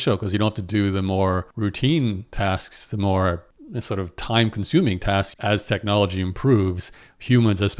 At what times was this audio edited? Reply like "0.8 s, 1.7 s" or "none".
5.3 s

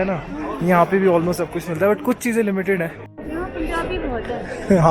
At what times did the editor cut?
3.1 s

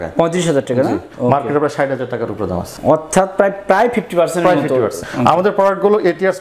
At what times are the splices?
1.1 s, 2.7 s, 5.0 s

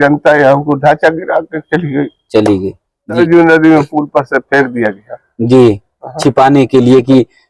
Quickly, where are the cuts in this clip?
3.2 s

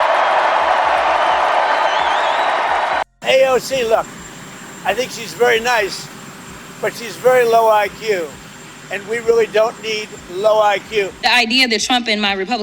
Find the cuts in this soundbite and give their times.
3.1 s, 11.1 s

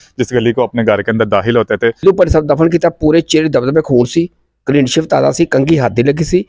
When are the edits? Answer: 2.0 s

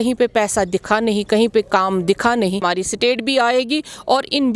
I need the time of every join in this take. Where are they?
2.6 s

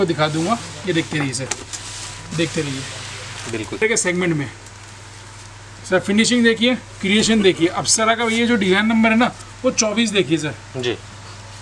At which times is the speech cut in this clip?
3.8 s

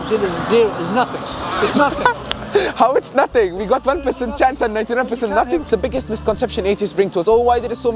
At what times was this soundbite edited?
5.6 s

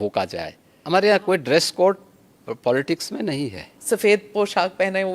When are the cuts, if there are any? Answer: 0.8 s, 3.8 s

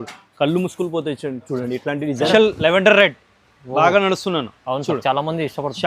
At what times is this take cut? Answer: 2.3 s

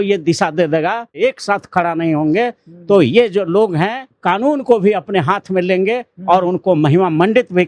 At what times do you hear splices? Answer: 1.2 s, 4.1 s

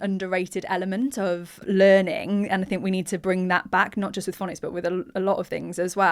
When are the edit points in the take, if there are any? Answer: 1.6 s

